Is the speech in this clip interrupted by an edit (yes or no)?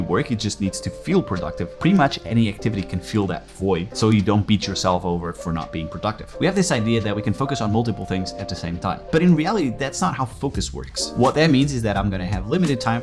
yes